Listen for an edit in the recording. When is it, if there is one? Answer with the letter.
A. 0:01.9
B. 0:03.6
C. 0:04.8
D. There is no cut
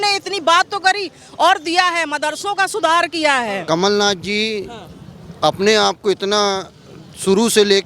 B